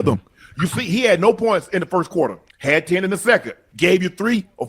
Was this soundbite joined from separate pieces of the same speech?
yes; 2 cuts; at 2.5 s, 3.6 s

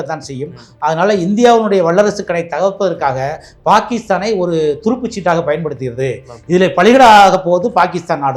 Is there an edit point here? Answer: no; 0 cuts

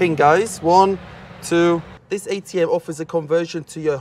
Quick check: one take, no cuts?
no; 1 cut; at 2.0 s

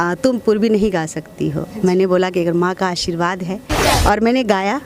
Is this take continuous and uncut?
no; 1 cut; at 3.8 s

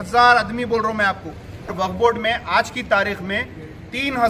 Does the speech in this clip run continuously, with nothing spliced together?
no; 1 cut; at 1.7 s

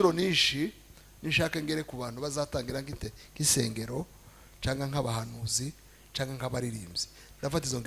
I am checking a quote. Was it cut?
no; 0 cuts

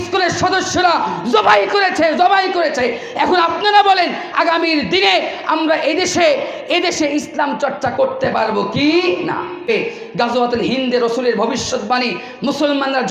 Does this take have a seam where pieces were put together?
yes; 1 cut; at 9.7 s

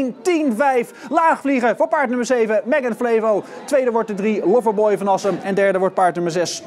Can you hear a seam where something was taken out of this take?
yes; 1 cut; at 5.4 s

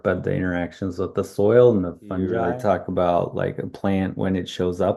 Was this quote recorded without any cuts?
no; 1 cut; at 2.4 s

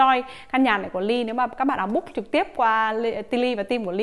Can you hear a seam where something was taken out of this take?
no; 0 cuts

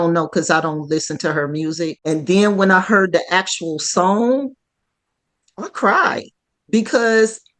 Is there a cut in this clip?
yes; 1 cut; at 2.0 s

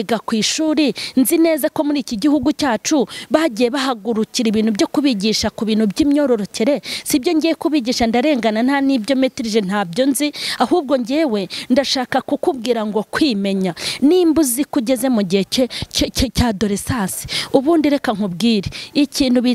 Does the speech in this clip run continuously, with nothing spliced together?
yes; 0 cuts

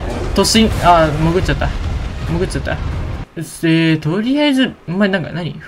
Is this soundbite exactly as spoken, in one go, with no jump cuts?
no; 1 cut; at 3.2 s

